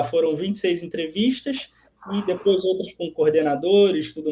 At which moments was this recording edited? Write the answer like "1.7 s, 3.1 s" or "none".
none

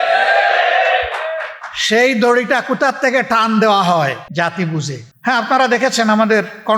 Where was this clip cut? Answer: 4.2 s, 5.1 s

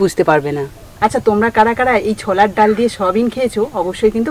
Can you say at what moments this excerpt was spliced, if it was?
none

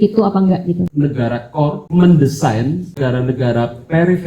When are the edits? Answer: 0.9 s, 1.8 s, 3.0 s

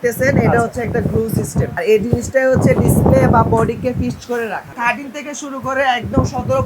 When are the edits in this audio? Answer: 1.7 s, 4.7 s

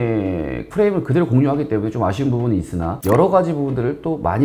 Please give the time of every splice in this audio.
none

